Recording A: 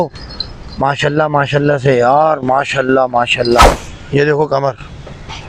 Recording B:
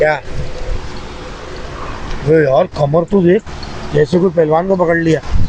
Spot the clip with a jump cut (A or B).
A